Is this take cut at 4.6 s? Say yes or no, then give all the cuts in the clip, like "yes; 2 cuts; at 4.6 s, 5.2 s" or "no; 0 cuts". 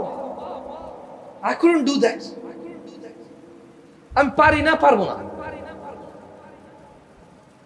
no; 0 cuts